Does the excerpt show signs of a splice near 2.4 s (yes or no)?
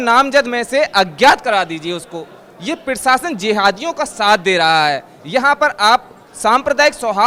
no